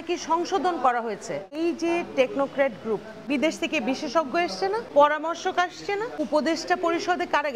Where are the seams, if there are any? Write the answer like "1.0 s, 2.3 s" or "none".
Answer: 1.6 s, 3.1 s, 4.9 s, 6.2 s